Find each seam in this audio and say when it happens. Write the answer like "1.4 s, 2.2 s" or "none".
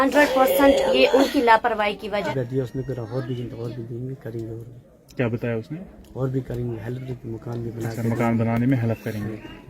2.3 s

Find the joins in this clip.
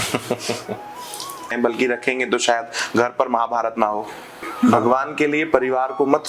1.5 s, 4.7 s

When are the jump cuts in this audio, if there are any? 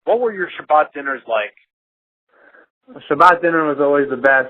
2.4 s

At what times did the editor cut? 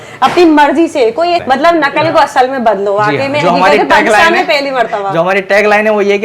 1.4 s

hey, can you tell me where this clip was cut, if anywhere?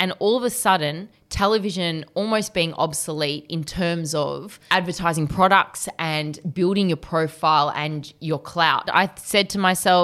8.9 s

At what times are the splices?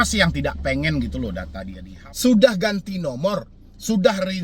1.8 s

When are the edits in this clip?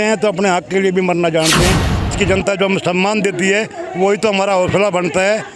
2.1 s

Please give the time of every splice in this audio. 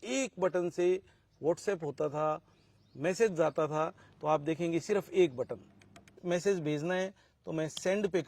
6.2 s

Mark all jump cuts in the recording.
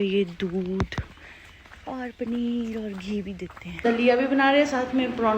3.8 s

